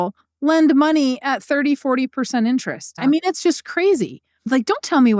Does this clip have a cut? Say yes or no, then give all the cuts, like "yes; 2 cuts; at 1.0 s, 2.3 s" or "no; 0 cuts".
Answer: yes; 2 cuts; at 2.9 s, 4.4 s